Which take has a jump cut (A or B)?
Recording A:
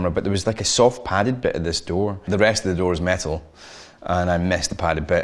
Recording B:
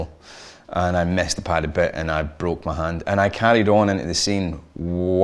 A